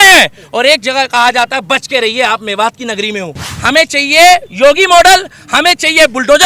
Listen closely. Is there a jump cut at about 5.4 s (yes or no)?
no